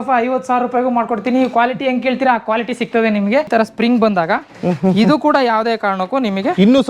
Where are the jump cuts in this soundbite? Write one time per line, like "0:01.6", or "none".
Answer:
0:03.5